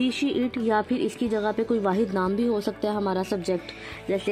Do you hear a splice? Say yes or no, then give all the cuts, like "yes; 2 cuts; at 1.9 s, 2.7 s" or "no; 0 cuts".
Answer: no; 0 cuts